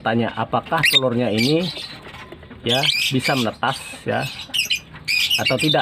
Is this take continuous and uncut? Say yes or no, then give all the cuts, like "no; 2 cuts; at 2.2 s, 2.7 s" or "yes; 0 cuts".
yes; 0 cuts